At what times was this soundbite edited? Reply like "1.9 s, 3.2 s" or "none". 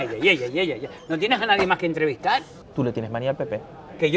2.6 s